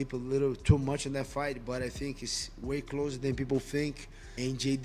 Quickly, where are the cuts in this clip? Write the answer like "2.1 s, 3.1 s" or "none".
none

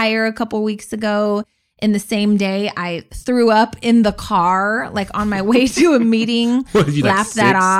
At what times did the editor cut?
none

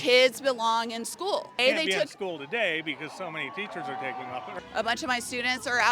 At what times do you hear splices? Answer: 1.6 s, 4.5 s

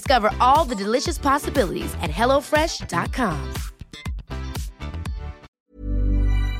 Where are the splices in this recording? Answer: 5.5 s

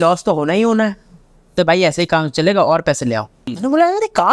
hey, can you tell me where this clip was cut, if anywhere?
1.5 s, 3.4 s

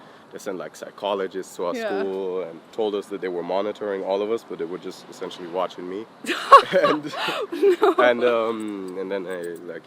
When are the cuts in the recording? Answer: none

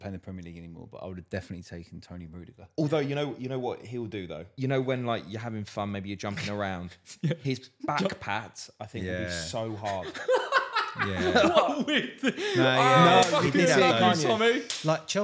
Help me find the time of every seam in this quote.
2.6 s, 4.4 s

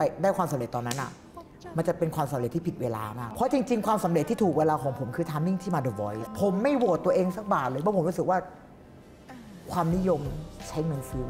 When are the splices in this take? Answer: 3.2 s, 6.2 s

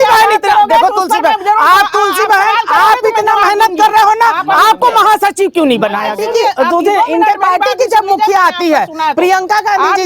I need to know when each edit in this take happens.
6.1 s

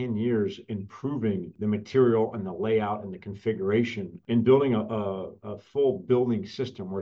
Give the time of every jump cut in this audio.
1.5 s, 4.1 s

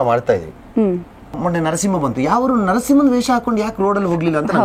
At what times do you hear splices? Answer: 1.4 s

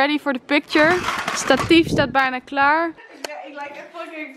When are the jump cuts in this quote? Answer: 3.2 s

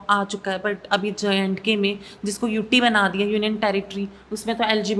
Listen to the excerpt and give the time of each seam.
none

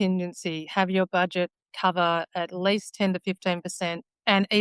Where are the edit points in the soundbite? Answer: none

